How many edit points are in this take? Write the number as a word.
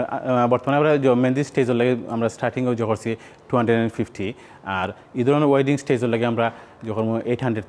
zero